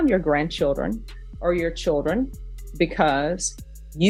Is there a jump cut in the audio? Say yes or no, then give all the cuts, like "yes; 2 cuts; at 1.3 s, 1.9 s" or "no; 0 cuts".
no; 0 cuts